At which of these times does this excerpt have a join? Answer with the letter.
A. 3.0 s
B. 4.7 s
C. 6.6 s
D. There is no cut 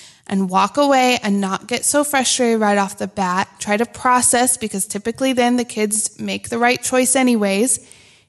A